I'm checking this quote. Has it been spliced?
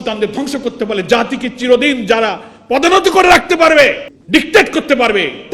yes; 1 cut; at 4.1 s

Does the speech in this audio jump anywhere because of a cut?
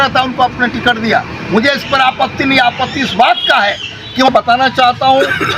yes; 1 cut; at 4.3 s

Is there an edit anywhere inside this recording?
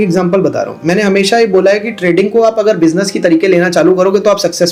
no; 0 cuts

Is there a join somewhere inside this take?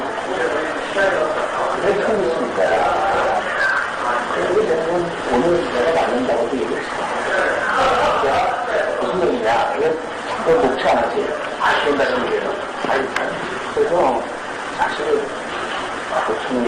yes; 1 cut; at 15.7 s

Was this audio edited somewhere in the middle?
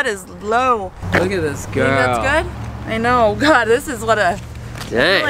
yes; 1 cut; at 1.0 s

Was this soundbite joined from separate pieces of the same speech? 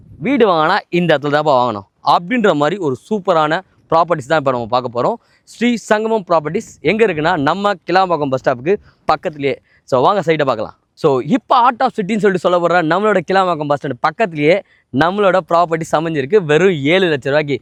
no; 0 cuts

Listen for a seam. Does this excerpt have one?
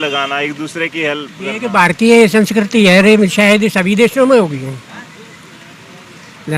no; 0 cuts

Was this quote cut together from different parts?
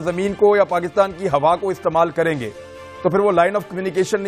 no; 0 cuts

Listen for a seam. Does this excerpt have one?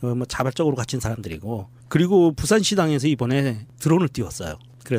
yes; 1 cut; at 1.2 s

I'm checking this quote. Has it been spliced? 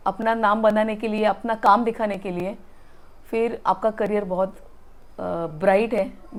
no; 0 cuts

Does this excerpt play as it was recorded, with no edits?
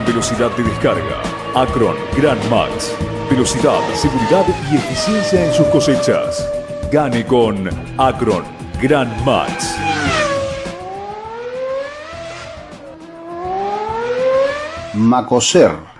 no; 1 cut; at 14.7 s

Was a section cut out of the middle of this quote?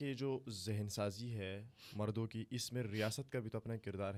no; 0 cuts

